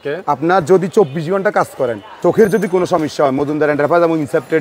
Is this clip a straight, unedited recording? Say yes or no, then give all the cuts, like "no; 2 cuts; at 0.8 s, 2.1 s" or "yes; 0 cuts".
no; 1 cut; at 2.2 s